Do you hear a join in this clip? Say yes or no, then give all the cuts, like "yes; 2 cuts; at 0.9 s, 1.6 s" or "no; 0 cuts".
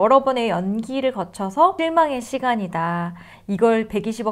yes; 1 cut; at 1.8 s